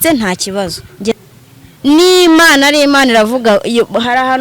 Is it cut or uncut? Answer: cut